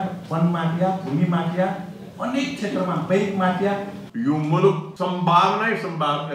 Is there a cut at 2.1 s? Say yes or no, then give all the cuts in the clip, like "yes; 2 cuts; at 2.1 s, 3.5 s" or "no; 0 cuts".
no; 2 cuts; at 4.0 s, 4.9 s